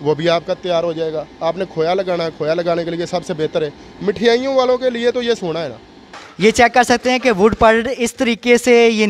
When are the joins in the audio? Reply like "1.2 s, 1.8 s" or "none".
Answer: 6.0 s